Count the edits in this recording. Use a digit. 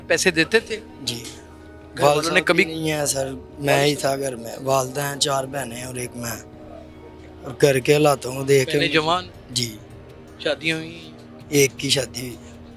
0